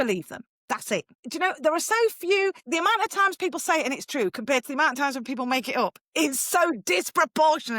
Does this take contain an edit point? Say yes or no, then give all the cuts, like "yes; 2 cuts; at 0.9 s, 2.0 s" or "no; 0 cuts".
yes; 2 cuts; at 1.2 s, 2.6 s